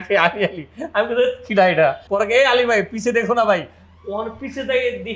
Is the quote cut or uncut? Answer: cut